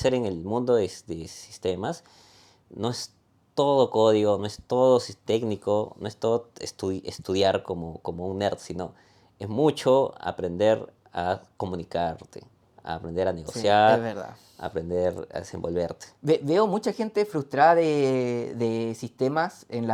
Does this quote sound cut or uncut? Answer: uncut